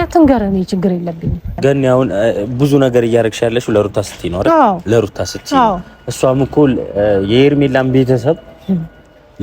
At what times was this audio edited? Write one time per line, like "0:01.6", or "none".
0:01.5